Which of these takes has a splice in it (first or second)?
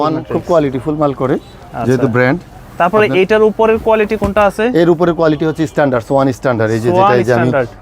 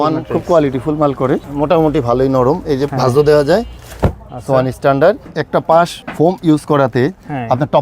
second